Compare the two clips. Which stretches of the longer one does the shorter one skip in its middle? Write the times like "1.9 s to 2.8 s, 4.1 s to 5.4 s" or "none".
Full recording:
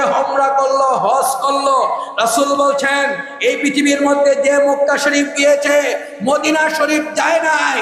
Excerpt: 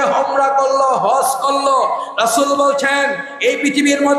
none